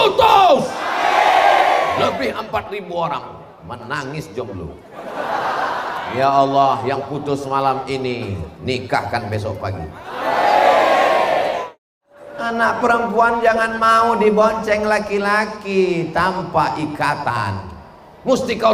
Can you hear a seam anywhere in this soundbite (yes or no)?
yes